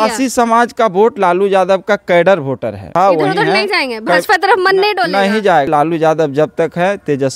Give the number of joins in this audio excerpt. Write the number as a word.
two